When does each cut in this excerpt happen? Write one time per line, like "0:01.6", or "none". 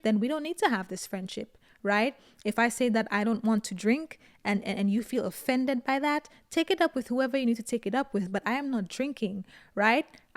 none